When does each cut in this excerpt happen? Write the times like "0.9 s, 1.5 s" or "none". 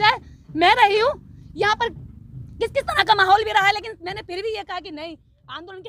none